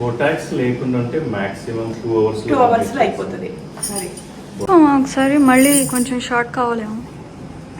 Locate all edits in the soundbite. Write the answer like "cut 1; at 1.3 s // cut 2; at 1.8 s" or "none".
cut 1; at 4.6 s